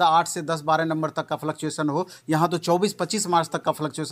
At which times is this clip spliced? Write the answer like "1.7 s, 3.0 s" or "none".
none